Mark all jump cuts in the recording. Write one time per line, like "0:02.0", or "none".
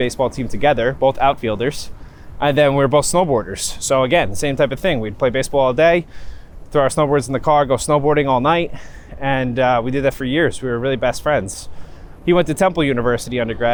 none